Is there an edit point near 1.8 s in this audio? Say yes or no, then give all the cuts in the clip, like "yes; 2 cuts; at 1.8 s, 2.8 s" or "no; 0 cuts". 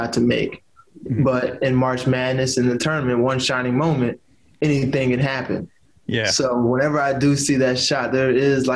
no; 0 cuts